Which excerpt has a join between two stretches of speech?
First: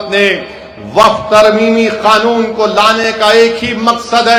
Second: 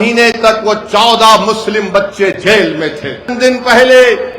second; 1 cut; at 3.3 s

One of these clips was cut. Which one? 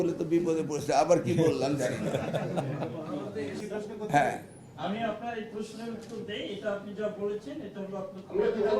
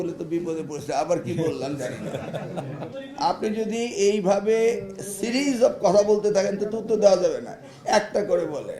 second; 1 cut; at 3.0 s

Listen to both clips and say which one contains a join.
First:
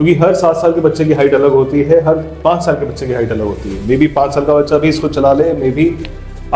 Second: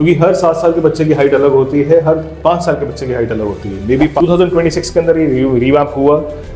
second; 1 cut; at 4.2 s

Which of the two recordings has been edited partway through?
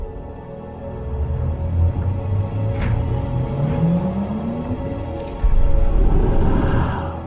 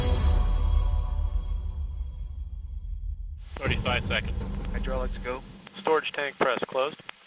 first; 1 cut; at 4.0 s

